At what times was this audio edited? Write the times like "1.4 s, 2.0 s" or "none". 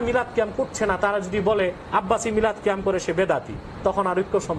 none